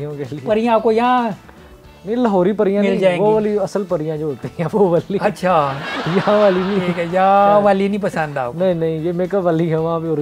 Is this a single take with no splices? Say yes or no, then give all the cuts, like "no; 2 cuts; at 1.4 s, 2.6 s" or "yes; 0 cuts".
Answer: yes; 0 cuts